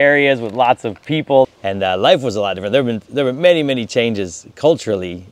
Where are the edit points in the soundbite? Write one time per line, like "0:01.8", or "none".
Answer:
0:01.5